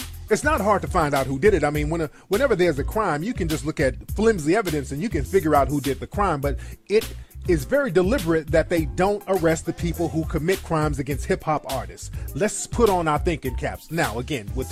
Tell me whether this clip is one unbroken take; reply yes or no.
yes